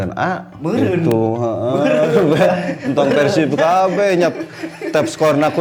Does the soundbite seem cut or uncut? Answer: uncut